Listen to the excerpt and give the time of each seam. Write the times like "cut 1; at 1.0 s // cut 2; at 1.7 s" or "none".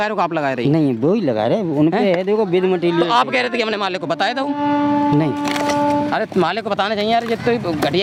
none